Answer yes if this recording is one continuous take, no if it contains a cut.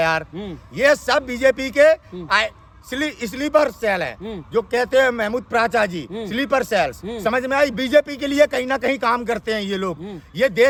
yes